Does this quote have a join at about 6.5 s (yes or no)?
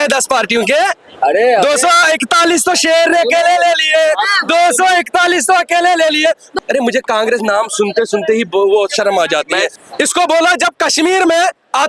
yes